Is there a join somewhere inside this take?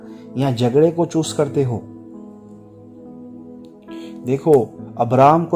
yes; 2 cuts; at 2.2 s, 3.6 s

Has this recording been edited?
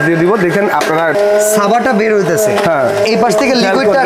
yes; 2 cuts; at 1.1 s, 3.0 s

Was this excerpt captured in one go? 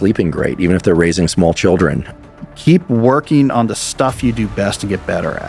no; 1 cut; at 2.2 s

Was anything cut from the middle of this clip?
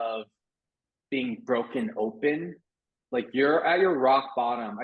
no; 0 cuts

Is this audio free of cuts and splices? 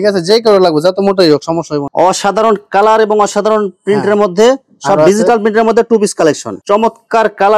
no; 2 cuts; at 1.9 s, 6.5 s

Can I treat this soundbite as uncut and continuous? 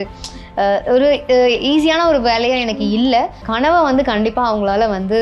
no; 1 cut; at 3.4 s

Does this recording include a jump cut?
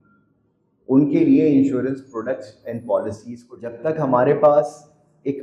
yes; 1 cut; at 3.8 s

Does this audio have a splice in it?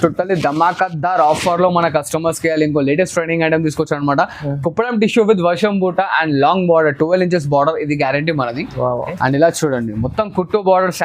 yes; 1 cut; at 9.1 s

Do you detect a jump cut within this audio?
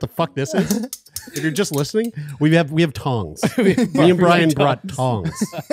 no; 0 cuts

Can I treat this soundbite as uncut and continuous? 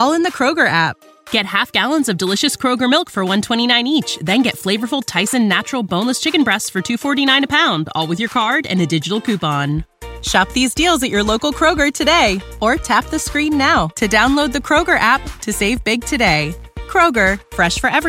yes; 0 cuts

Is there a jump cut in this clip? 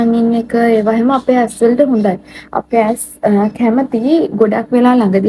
no; 0 cuts

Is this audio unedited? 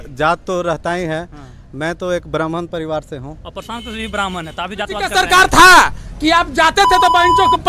no; 1 cut; at 5.1 s

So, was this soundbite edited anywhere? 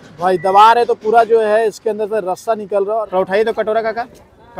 yes; 1 cut; at 3.0 s

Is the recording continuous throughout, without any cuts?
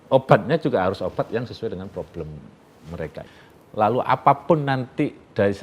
no; 1 cut; at 3.4 s

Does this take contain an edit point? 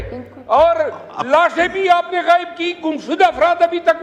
no; 0 cuts

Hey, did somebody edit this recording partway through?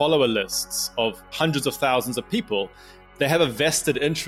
yes; 2 cuts; at 1.3 s, 3.0 s

